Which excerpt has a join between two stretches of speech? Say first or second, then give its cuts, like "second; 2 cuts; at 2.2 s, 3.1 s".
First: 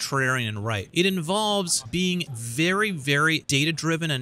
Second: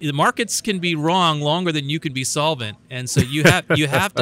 first; 3 cuts; at 0.8 s, 2.2 s, 3.4 s